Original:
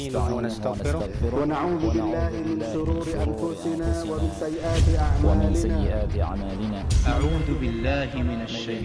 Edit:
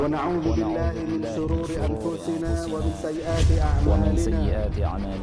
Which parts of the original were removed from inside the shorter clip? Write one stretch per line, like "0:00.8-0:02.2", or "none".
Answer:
none